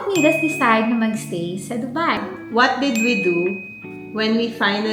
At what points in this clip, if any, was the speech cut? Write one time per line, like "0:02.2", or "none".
0:02.3